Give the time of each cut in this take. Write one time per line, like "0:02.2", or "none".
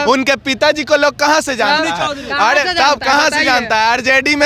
none